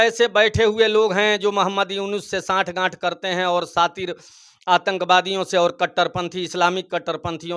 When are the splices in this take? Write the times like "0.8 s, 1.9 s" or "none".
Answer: none